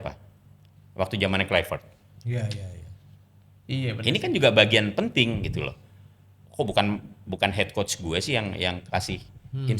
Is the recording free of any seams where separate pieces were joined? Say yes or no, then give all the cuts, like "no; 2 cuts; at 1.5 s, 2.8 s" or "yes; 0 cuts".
yes; 0 cuts